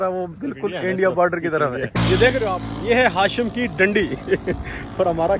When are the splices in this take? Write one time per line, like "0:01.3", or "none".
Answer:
0:01.9